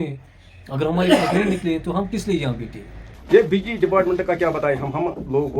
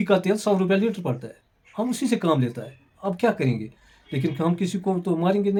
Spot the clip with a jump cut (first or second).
first